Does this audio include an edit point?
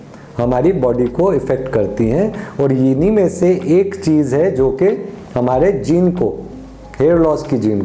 no; 0 cuts

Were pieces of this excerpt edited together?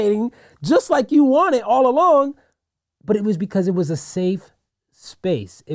no; 0 cuts

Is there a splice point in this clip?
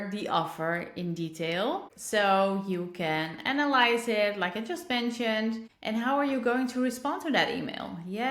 no; 0 cuts

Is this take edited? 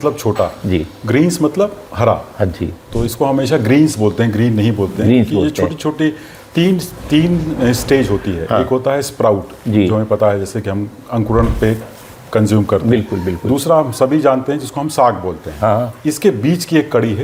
no; 0 cuts

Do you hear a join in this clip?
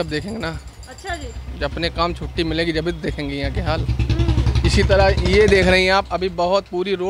no; 0 cuts

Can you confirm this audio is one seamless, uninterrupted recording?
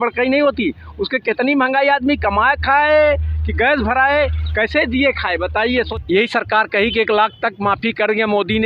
no; 1 cut; at 5.9 s

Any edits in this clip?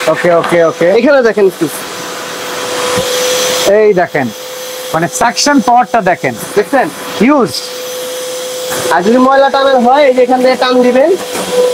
no; 0 cuts

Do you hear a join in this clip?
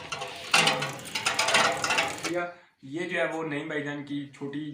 yes; 1 cut; at 2.2 s

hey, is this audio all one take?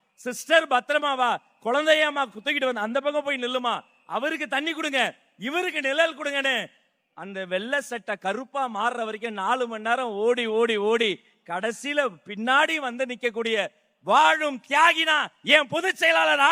yes; 0 cuts

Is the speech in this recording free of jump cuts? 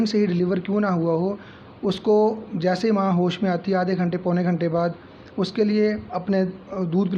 yes; 0 cuts

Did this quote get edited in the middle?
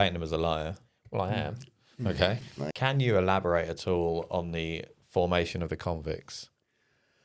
yes; 1 cut; at 2.7 s

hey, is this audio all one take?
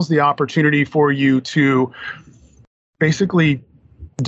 yes; 0 cuts

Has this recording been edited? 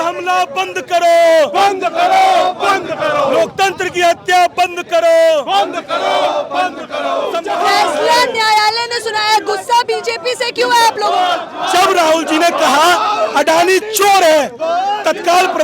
yes; 2 cuts; at 7.4 s, 11.5 s

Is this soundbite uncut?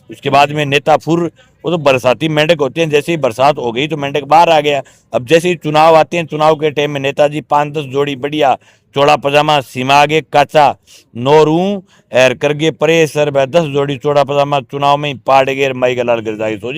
yes; 0 cuts

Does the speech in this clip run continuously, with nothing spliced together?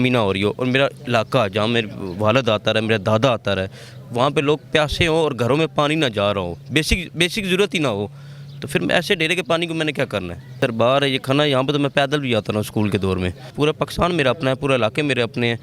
no; 2 cuts; at 10.6 s, 13.5 s

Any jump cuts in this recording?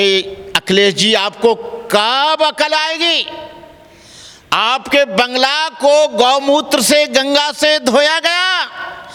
no; 0 cuts

